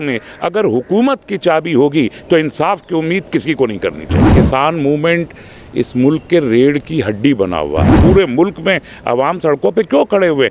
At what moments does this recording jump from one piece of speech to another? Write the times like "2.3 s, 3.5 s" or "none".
4.3 s, 8.0 s

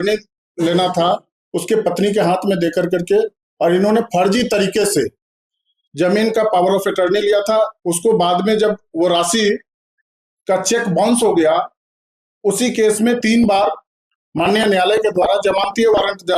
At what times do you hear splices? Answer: none

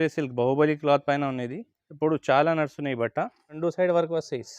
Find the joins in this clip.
3.6 s

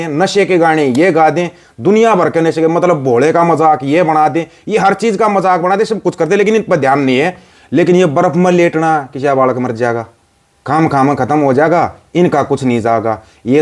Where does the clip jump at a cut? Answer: 7.4 s

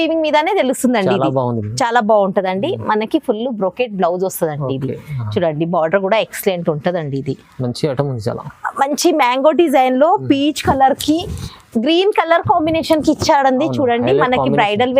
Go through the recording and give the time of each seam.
none

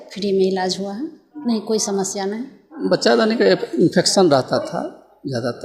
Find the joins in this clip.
2.8 s

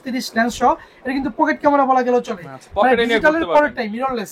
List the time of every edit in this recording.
none

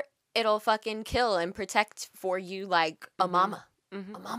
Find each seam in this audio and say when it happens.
3.0 s

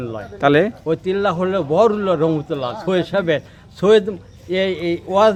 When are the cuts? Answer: none

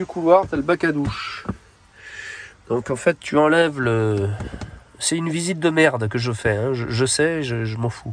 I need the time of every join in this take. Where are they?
none

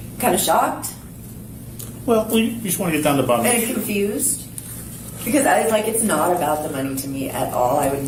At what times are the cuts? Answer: none

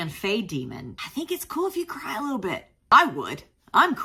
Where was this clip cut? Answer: none

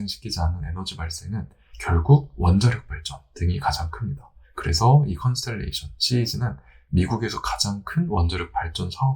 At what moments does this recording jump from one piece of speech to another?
none

